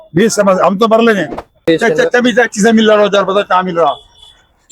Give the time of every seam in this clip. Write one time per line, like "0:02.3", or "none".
0:01.6